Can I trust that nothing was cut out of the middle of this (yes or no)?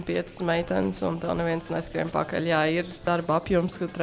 no